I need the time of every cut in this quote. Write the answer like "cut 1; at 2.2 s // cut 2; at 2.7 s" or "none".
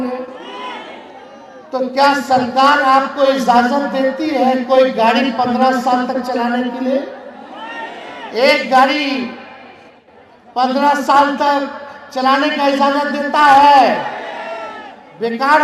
none